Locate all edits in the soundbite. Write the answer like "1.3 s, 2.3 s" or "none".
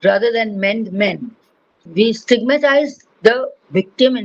1.8 s

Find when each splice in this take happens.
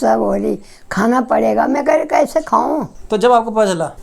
2.9 s

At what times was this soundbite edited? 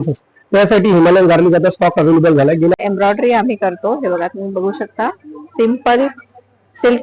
2.8 s

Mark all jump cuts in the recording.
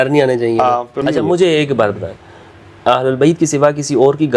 1.0 s

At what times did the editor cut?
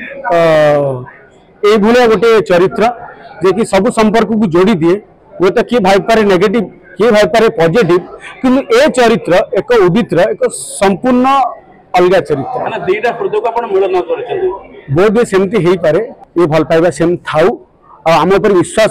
16.2 s

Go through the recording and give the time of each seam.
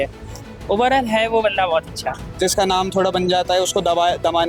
2.3 s

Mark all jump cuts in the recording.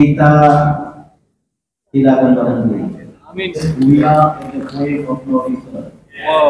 3.7 s

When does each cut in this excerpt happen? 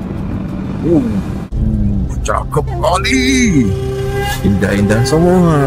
1.5 s

